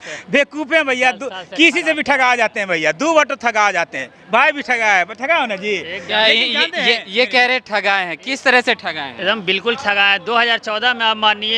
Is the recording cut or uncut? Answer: uncut